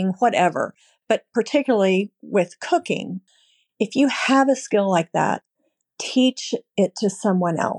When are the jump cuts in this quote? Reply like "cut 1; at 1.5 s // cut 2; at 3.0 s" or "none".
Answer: cut 1; at 3.2 s